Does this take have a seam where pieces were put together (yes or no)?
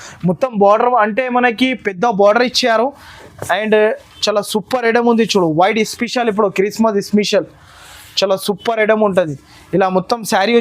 no